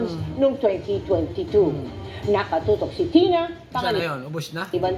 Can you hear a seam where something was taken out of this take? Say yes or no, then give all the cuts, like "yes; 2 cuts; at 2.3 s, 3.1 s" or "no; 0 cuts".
no; 0 cuts